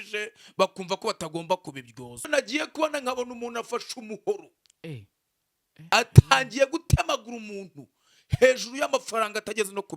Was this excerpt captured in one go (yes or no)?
no